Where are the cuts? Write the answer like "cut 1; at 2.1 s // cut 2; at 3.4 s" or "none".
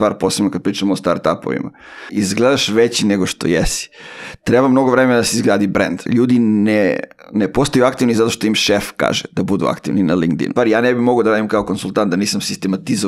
cut 1; at 2.1 s // cut 2; at 6.0 s // cut 3; at 10.5 s